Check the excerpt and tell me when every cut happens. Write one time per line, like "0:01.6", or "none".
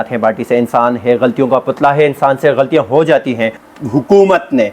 0:03.5